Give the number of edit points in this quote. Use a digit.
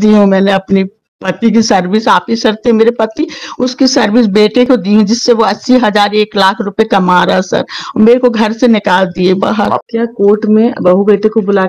1